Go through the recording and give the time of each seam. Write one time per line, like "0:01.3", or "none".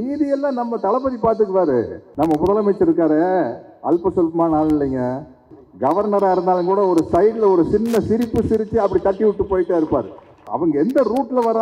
0:02.0
0:05.5
0:10.5